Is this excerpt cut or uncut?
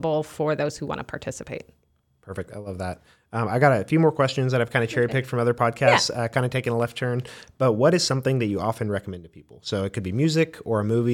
uncut